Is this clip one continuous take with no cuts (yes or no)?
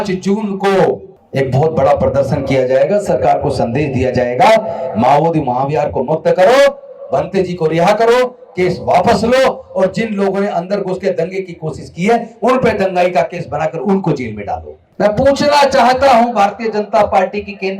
no